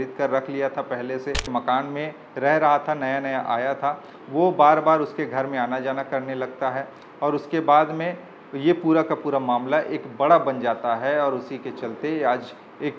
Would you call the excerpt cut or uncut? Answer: cut